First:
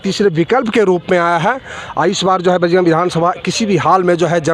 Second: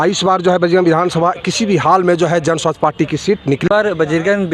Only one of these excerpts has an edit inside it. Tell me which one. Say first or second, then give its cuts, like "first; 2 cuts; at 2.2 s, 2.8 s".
second; 1 cut; at 3.5 s